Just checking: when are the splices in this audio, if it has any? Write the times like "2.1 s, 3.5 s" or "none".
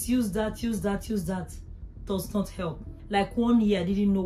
3.0 s